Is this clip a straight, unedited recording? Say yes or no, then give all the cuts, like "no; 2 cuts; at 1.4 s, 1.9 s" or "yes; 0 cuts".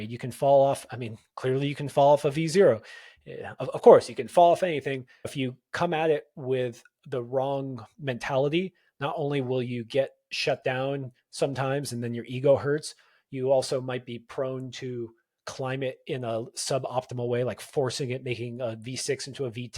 no; 1 cut; at 5.3 s